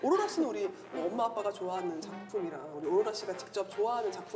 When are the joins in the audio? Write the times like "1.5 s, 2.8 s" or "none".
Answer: none